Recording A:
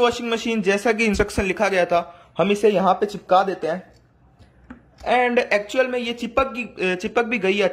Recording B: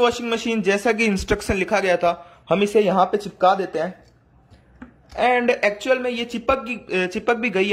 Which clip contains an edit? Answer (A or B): A